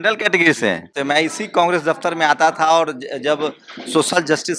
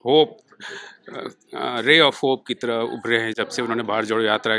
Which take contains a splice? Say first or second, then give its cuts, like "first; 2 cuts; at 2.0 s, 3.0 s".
first; 1 cut; at 0.9 s